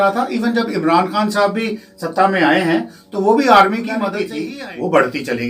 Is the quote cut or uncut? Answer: cut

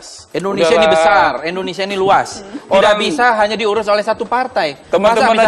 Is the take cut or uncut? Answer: uncut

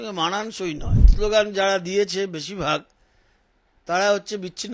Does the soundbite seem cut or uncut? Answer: cut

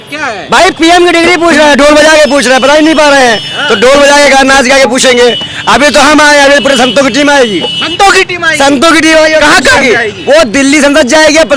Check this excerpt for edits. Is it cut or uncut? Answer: uncut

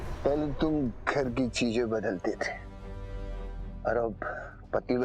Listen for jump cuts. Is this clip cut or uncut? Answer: uncut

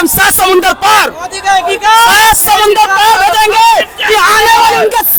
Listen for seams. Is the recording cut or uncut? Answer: uncut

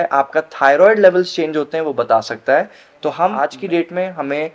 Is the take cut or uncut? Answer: cut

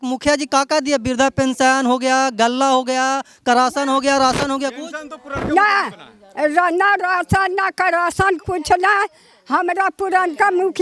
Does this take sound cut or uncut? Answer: uncut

